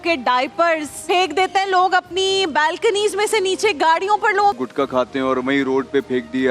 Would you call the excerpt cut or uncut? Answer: cut